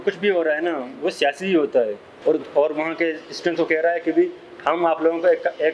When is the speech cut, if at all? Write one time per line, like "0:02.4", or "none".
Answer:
0:02.1